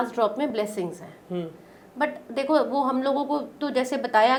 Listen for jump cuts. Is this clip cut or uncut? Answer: uncut